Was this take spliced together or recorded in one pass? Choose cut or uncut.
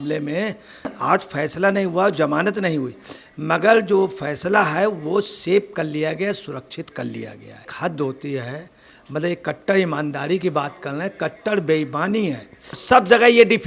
cut